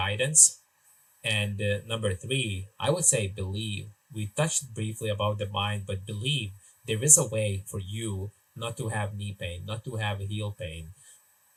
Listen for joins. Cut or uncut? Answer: uncut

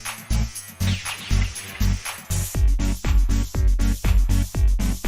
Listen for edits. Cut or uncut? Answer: uncut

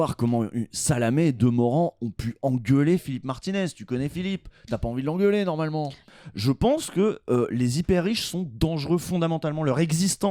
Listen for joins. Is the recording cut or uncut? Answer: cut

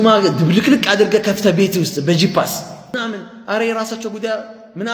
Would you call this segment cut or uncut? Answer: cut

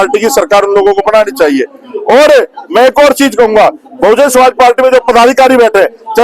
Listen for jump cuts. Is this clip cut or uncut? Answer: uncut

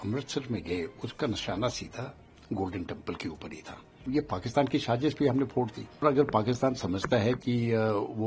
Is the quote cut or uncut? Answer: cut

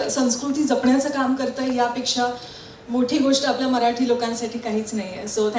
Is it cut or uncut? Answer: uncut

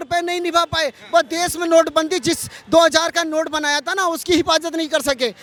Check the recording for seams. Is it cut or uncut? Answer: uncut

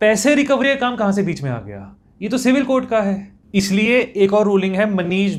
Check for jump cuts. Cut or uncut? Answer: uncut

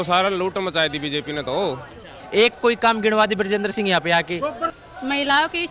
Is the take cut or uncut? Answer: cut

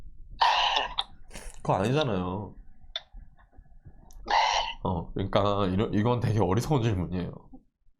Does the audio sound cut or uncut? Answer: uncut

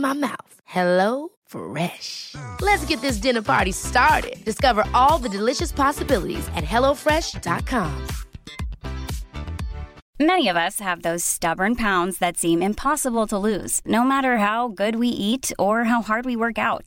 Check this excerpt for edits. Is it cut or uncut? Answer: cut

